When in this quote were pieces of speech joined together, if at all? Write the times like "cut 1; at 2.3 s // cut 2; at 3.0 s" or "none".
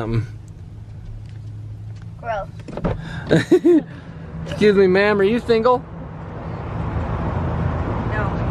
none